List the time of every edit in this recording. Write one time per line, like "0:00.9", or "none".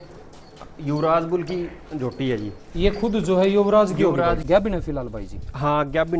0:04.4